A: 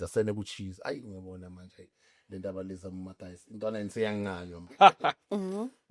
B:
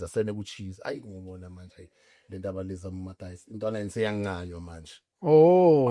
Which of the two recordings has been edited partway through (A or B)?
A